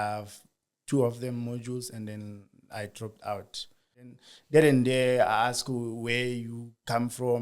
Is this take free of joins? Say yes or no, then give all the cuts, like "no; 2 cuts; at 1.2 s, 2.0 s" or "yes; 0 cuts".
no; 1 cut; at 4.1 s